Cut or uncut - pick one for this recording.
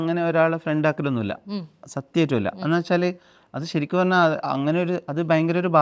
uncut